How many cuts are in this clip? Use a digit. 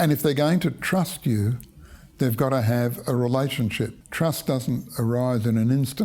0